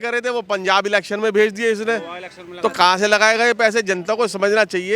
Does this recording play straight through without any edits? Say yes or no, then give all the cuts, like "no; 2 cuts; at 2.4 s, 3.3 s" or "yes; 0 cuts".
yes; 0 cuts